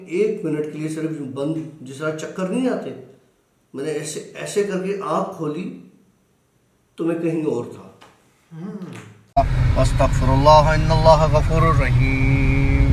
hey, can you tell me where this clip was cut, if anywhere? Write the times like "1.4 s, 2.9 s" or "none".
9.2 s

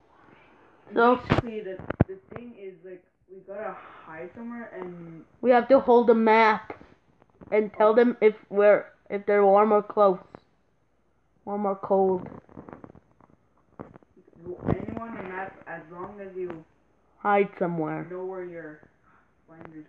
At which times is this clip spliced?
none

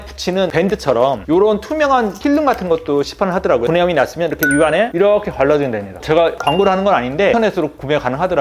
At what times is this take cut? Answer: 1.2 s, 7.3 s

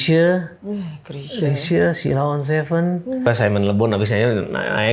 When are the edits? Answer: 3.3 s

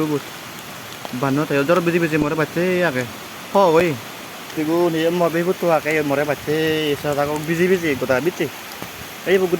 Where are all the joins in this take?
4.5 s

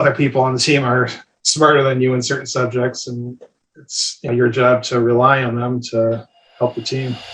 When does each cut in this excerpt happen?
4.3 s, 6.4 s

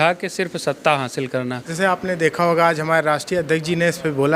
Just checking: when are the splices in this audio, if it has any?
1.6 s

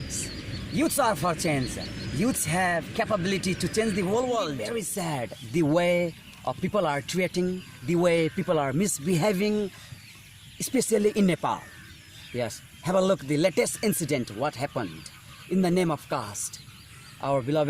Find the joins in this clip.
4.8 s

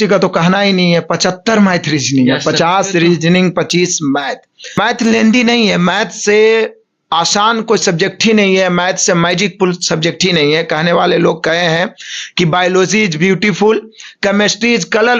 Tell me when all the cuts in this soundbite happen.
4.8 s

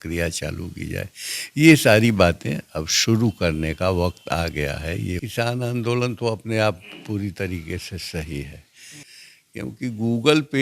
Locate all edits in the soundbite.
5.2 s, 9.1 s

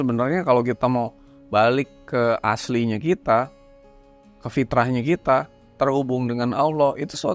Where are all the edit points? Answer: none

